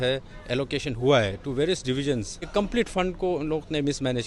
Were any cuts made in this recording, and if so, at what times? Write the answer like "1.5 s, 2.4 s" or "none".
2.5 s

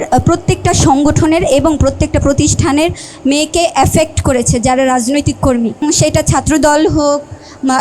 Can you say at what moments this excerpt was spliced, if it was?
5.8 s

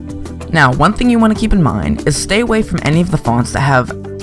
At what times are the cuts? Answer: 2.2 s

